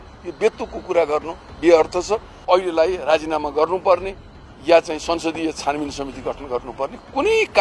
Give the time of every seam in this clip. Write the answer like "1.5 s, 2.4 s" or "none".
2.3 s